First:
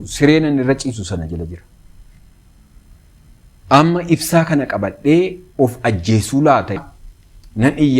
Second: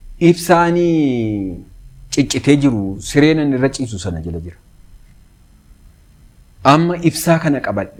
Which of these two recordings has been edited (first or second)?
first